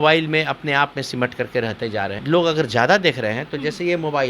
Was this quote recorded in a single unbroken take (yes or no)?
no